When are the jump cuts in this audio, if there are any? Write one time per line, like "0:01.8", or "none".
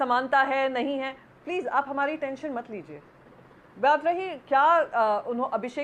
none